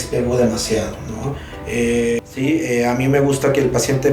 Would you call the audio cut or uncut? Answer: cut